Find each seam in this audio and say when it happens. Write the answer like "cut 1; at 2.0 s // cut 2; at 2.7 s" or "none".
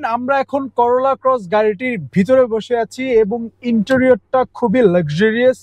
none